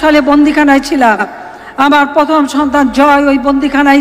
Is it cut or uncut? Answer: uncut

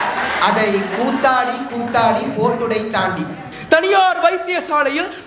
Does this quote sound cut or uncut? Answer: cut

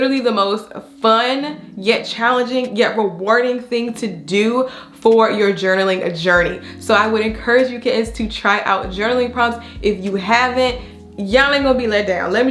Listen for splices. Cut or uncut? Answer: uncut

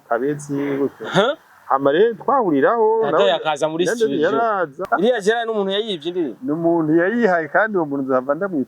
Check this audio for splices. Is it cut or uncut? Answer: cut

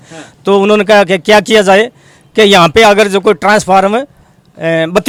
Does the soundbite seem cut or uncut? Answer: uncut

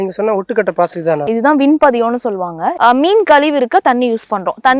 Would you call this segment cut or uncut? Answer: cut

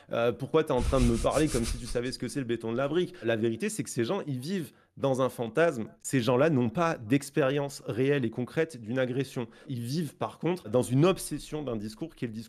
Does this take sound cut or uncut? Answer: cut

